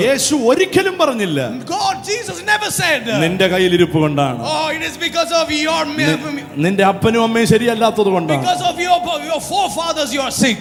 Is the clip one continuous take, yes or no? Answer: yes